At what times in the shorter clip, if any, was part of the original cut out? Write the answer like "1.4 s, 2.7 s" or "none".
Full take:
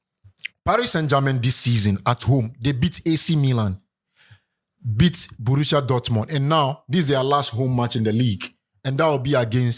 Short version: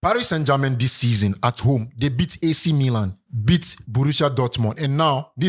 3.2 s